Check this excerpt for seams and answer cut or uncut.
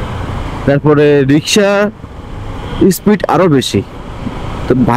uncut